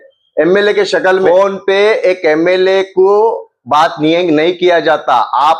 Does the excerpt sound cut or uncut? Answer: cut